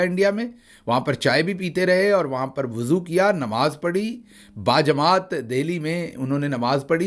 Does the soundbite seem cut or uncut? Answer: uncut